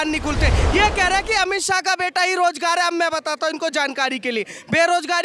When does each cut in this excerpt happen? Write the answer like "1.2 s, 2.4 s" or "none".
none